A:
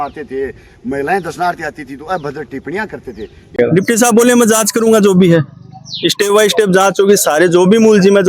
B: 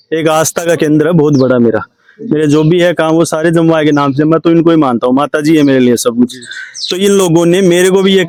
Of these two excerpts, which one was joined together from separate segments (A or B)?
A